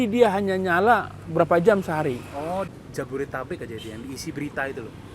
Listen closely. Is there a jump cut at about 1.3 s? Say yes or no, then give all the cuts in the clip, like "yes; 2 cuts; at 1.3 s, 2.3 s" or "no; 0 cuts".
no; 1 cut; at 2.7 s